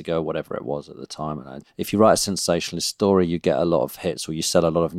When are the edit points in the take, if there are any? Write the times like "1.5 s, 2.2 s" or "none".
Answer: 1.6 s